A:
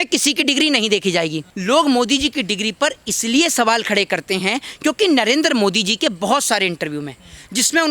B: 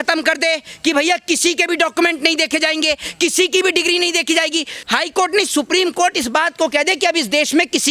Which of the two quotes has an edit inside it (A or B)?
A